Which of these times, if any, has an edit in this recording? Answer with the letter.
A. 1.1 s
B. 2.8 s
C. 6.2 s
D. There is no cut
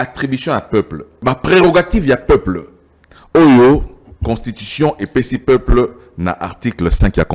A